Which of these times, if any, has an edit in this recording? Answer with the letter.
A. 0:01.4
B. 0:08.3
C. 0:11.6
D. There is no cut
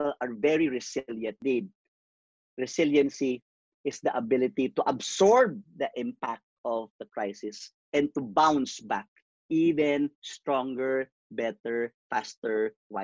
A